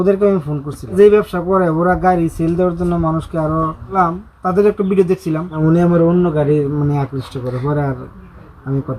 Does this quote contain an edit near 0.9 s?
yes; 3 cuts; at 0.9 s, 4.0 s, 5.5 s

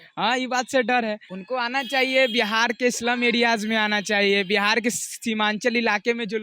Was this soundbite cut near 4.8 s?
no; 1 cut; at 1.3 s

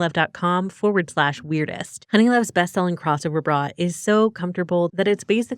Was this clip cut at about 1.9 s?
yes; 1 cut; at 1.9 s

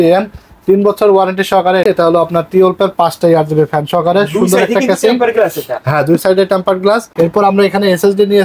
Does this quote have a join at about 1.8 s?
yes; 2 cuts; at 1.8 s, 7.1 s

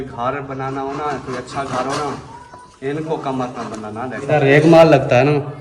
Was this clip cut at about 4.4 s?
yes; 1 cut; at 4.4 s

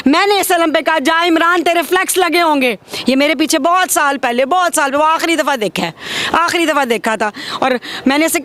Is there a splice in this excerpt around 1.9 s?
no; 0 cuts

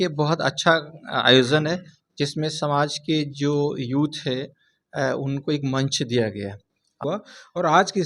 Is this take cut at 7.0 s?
yes; 1 cut; at 7.0 s

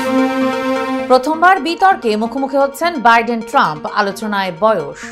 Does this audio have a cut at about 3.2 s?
no; 1 cut; at 1.0 s

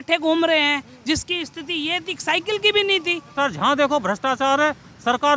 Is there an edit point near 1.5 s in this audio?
no; 1 cut; at 3.2 s

